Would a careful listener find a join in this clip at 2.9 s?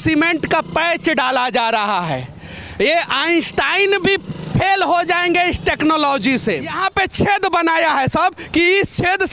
no; 1 cut; at 6.8 s

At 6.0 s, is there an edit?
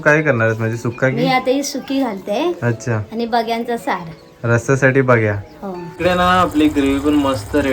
yes; 1 cut; at 6.0 s

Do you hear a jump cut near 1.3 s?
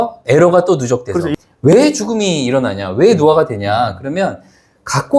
yes; 1 cut; at 1.3 s

